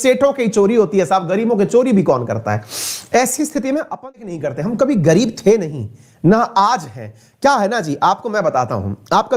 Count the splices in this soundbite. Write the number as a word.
one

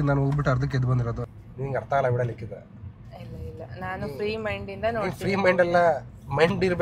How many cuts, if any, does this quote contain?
one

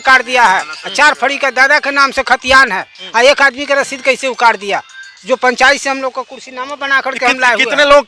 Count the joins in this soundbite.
zero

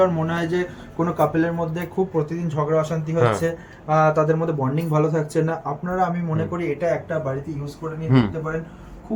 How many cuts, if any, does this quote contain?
zero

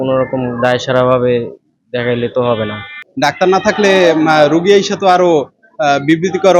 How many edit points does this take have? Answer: one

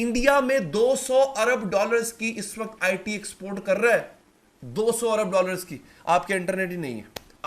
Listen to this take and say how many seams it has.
zero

